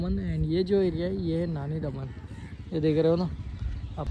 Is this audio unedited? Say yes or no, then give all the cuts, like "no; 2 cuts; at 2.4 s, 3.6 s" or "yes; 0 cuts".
yes; 0 cuts